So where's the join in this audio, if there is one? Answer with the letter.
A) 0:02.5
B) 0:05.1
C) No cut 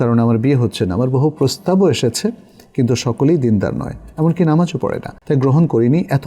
B